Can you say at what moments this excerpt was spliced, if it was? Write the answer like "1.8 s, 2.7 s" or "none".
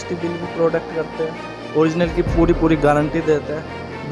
none